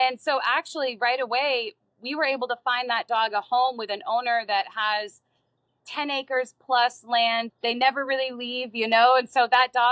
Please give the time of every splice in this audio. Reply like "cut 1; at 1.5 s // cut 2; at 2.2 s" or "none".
cut 1; at 7.5 s